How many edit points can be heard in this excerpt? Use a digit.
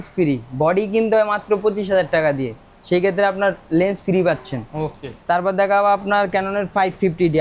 0